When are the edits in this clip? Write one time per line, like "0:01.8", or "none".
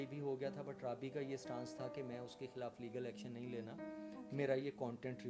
none